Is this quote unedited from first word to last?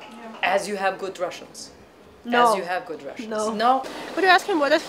no; 1 cut; at 3.9 s

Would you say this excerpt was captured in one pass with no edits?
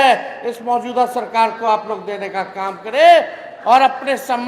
yes; 0 cuts

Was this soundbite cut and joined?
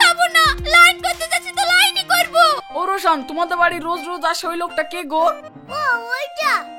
yes; 1 cut; at 2.6 s

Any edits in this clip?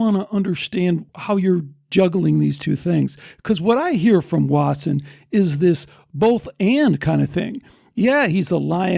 yes; 1 cut; at 1.1 s

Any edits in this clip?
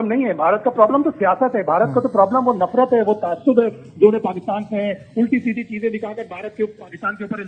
no; 0 cuts

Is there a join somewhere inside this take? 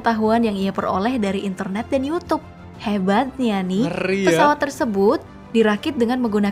no; 0 cuts

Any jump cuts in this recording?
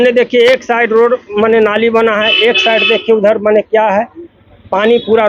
no; 0 cuts

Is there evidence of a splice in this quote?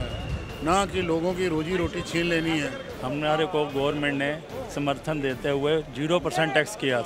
yes; 1 cut; at 2.9 s

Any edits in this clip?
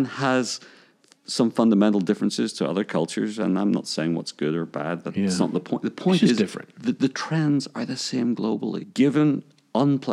yes; 1 cut; at 8.8 s

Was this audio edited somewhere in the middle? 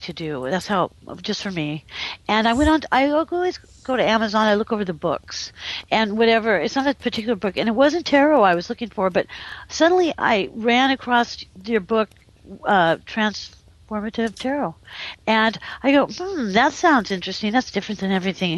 no; 0 cuts

